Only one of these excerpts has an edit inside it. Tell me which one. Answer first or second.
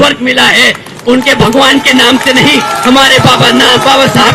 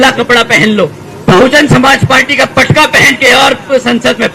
second